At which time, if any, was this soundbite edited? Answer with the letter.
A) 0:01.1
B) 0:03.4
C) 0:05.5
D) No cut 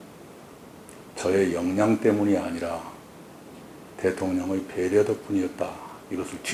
D